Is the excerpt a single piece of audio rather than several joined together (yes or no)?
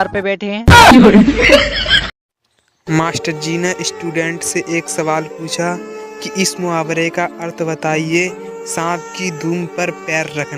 no